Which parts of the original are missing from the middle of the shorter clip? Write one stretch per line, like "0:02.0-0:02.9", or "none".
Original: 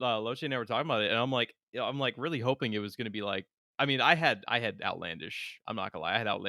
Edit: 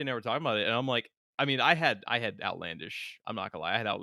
0:01.6-0:03.6